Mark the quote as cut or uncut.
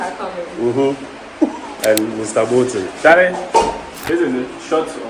cut